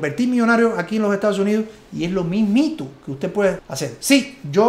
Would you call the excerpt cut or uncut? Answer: cut